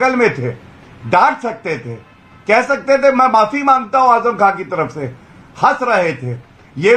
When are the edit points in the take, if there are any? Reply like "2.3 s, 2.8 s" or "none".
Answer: none